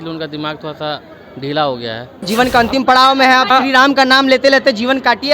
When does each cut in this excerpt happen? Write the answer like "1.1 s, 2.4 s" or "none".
2.3 s, 3.5 s